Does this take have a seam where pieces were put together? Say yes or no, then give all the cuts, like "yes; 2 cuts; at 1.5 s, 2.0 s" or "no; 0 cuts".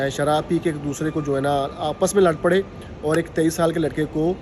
no; 0 cuts